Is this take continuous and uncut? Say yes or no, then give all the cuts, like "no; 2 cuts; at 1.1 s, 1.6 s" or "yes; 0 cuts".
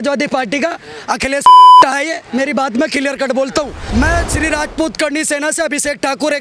no; 3 cuts; at 1.4 s, 1.8 s, 3.8 s